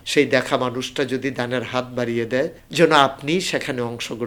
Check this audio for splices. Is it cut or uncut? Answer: uncut